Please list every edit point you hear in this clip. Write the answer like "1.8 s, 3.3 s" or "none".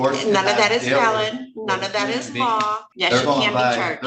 2.9 s

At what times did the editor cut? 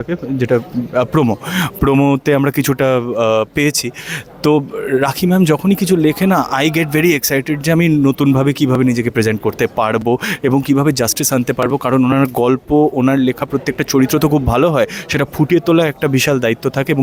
none

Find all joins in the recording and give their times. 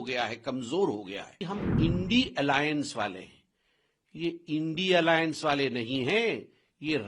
1.4 s

